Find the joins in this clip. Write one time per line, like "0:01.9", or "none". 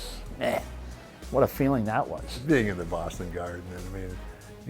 0:02.3

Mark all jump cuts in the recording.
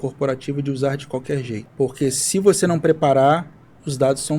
0:01.6

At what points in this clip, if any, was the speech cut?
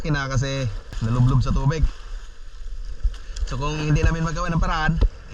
0:00.9

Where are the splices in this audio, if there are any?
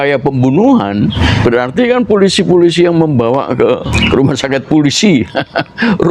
0:01.2
0:03.9

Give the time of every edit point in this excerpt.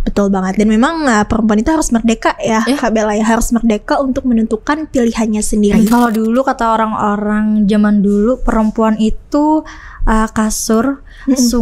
0:05.9

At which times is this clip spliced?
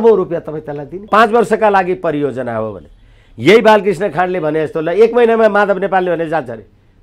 0:01.1

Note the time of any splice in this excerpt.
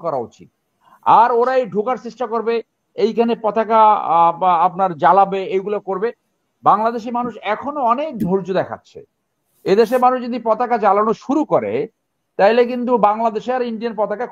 none

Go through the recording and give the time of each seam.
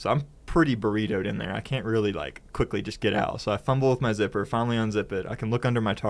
none

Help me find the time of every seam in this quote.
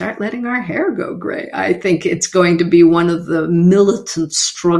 none

